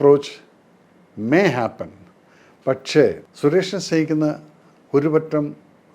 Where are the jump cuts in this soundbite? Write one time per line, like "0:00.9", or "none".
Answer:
0:03.3